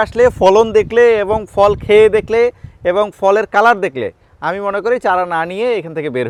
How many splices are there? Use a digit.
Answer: 0